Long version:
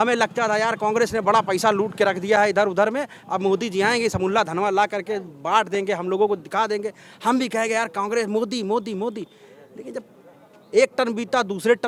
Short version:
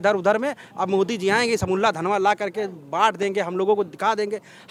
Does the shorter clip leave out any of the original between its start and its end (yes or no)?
no